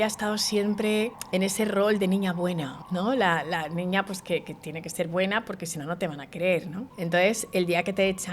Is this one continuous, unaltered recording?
no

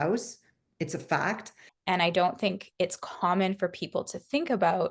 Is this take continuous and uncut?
no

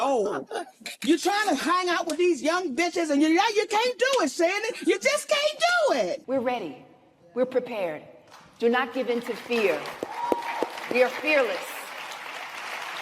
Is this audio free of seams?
no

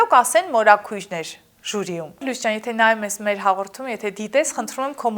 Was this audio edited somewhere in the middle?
yes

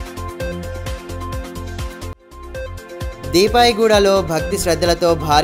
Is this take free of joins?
no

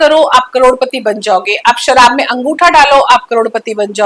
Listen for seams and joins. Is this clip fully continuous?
yes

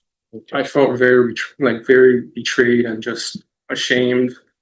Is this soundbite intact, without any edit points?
yes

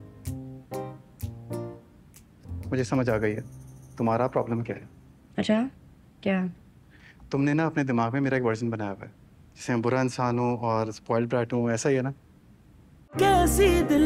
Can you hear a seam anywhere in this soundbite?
yes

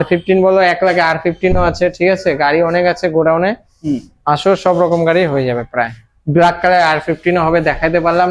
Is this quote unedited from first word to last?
yes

